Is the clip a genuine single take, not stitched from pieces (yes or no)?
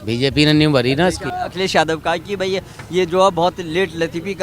yes